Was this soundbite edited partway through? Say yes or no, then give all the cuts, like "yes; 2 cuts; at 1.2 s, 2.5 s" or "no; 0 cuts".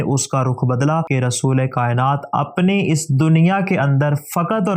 yes; 1 cut; at 1.1 s